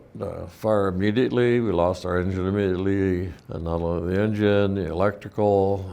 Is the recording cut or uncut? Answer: cut